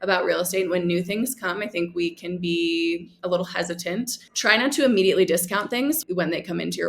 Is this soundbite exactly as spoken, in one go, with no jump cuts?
no; 2 cuts; at 4.2 s, 6.0 s

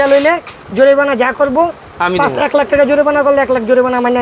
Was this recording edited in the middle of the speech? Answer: no; 0 cuts

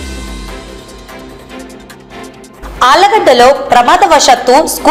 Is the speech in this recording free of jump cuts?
yes; 0 cuts

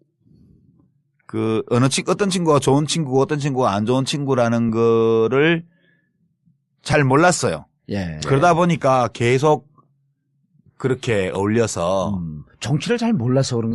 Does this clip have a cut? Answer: yes; 1 cut; at 9.3 s

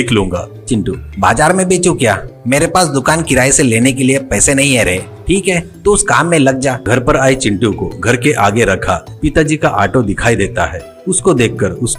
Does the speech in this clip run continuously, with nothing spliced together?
no; 1 cut; at 6.8 s

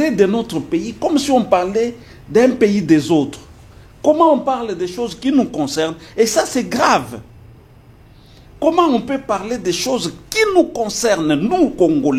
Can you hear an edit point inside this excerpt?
no; 0 cuts

